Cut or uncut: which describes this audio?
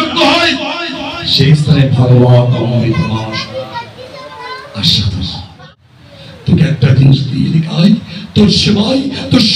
cut